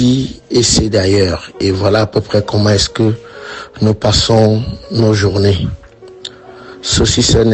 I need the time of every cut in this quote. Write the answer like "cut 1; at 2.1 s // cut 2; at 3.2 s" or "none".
cut 1; at 6.4 s